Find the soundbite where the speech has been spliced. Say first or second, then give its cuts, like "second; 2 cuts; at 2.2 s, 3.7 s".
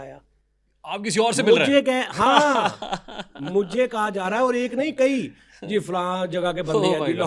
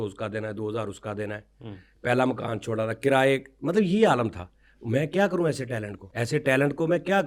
second; 1 cut; at 6.0 s